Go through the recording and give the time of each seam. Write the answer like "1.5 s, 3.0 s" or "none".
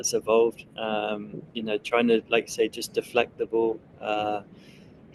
none